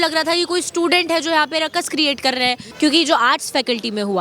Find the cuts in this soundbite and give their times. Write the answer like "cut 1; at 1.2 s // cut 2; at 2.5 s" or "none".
cut 1; at 2.7 s